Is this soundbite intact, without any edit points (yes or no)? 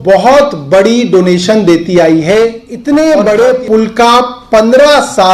no